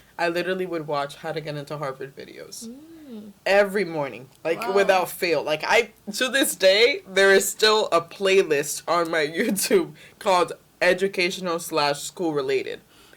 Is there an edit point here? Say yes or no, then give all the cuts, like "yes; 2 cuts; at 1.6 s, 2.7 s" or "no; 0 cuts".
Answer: no; 0 cuts